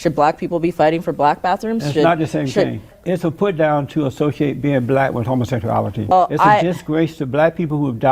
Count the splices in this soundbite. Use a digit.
2